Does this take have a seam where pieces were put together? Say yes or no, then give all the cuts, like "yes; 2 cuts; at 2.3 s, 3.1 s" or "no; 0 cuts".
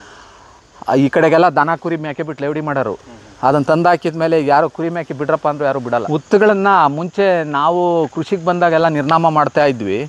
yes; 1 cut; at 6.0 s